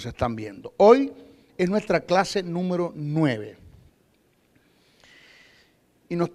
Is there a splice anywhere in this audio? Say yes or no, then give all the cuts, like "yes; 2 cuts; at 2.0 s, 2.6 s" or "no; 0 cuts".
no; 0 cuts